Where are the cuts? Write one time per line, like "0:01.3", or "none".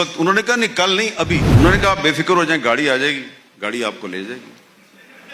0:01.5